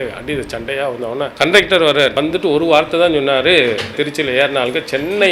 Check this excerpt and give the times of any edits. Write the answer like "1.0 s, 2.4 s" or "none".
1.3 s, 2.1 s, 3.9 s